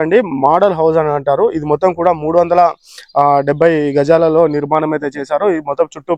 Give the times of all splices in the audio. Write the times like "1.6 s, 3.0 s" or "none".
none